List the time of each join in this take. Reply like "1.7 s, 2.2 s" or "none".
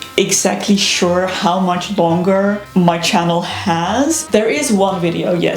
2.6 s, 4.2 s